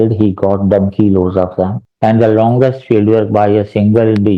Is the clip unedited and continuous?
no; 1 cut; at 1.8 s

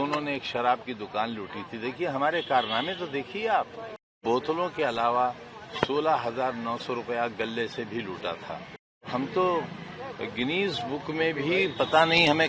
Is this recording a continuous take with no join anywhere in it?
no; 2 cuts; at 4.2 s, 9.1 s

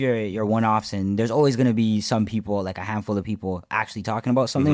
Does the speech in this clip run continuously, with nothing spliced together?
yes; 0 cuts

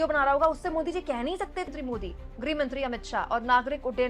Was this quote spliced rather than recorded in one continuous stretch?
yes; 1 cut; at 1.7 s

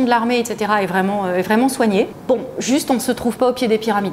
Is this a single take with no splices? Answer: no; 1 cut; at 2.2 s

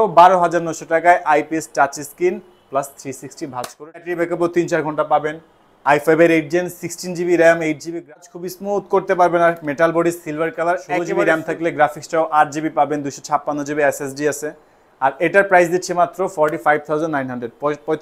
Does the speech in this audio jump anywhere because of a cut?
yes; 3 cuts; at 4.0 s, 8.1 s, 11.0 s

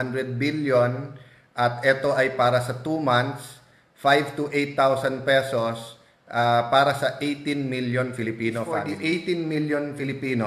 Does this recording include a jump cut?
yes; 1 cut; at 8.7 s

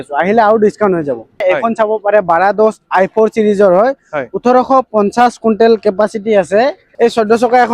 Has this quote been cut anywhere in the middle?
yes; 2 cuts; at 1.4 s, 6.8 s

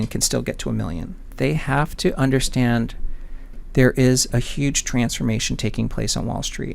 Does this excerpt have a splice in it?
yes; 1 cut; at 1.3 s

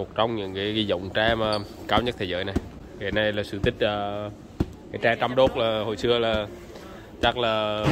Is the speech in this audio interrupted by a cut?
no; 0 cuts

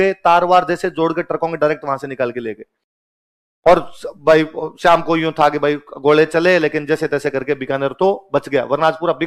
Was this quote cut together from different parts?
no; 0 cuts

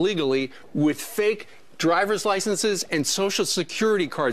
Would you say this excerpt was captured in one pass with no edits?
no; 1 cut; at 1.5 s

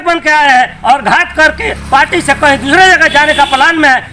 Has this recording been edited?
no; 0 cuts

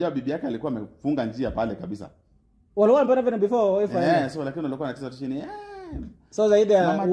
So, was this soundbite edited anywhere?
no; 0 cuts

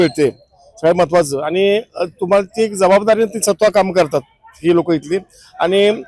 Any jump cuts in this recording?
no; 0 cuts

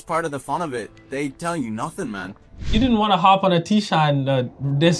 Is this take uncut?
no; 1 cut; at 2.7 s

